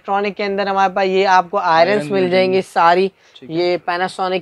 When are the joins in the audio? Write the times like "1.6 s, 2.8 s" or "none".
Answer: none